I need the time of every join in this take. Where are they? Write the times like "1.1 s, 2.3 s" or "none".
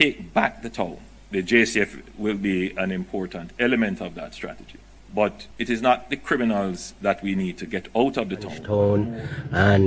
8.6 s